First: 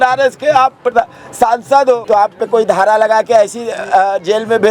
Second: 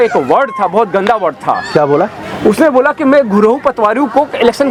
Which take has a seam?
first; 1 cut; at 2.0 s

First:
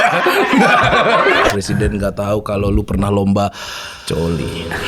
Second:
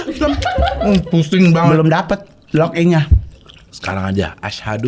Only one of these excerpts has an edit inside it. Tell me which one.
first; 1 cut; at 1.4 s

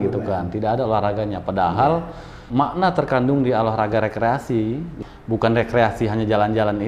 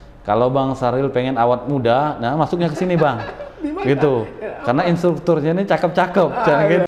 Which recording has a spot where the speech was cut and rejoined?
first; 2 cuts; at 2.4 s, 4.9 s

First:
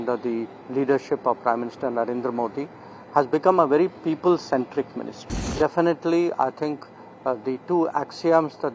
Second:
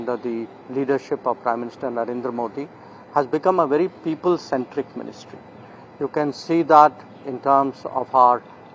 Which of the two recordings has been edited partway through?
first; 1 cut; at 5.5 s

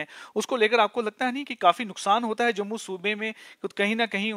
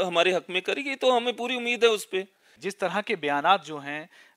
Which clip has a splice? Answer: second; 1 cut; at 2.6 s

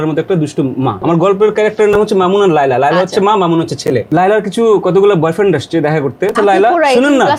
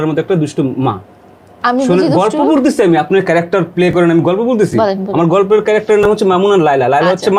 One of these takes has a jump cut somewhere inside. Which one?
first; 3 cuts; at 1.0 s, 4.1 s, 6.3 s

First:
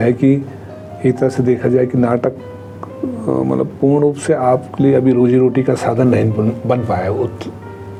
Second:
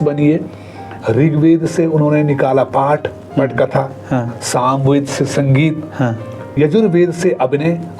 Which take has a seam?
second; 2 cuts; at 0.9 s, 6.6 s

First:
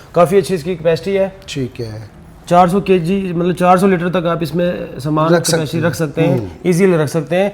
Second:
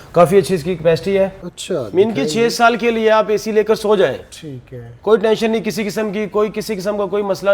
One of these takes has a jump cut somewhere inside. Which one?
second; 1 cut; at 1.4 s

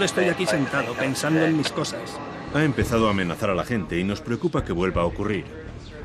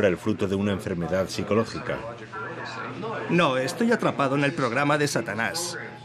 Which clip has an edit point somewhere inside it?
second; 1 cut; at 4.5 s

